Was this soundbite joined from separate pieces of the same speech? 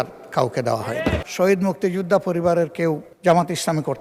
yes; 2 cuts; at 1.2 s, 3.1 s

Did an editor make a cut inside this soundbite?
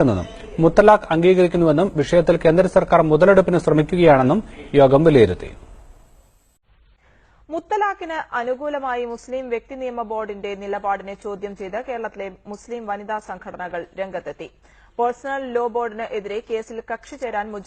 no; 0 cuts

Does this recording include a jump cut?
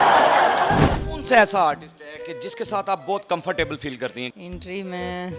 yes; 2 cuts; at 1.1 s, 4.3 s

